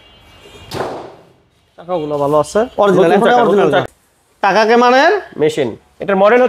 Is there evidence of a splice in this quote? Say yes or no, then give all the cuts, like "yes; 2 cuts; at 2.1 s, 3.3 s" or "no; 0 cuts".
yes; 1 cut; at 3.8 s